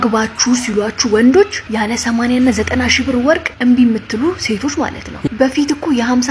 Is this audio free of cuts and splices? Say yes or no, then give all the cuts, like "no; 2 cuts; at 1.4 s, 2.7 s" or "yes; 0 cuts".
no; 3 cuts; at 1.6 s, 3.5 s, 5.3 s